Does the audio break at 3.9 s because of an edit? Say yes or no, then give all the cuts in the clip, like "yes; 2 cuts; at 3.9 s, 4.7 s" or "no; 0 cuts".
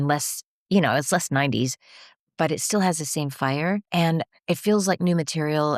yes; 1 cut; at 3.9 s